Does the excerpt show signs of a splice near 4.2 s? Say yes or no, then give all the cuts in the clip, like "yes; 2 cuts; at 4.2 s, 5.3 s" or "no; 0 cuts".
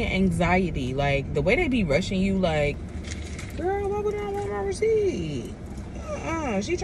no; 1 cut; at 2.8 s